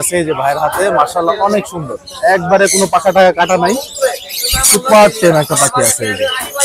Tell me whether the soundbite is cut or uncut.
uncut